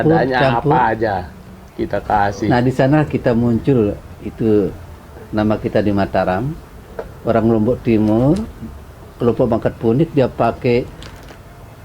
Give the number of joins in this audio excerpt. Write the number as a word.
zero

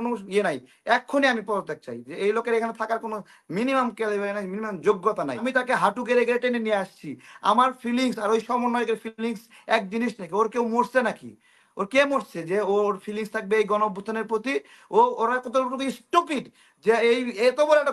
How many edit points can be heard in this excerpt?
one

